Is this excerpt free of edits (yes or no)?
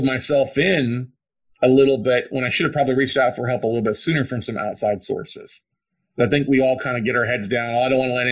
yes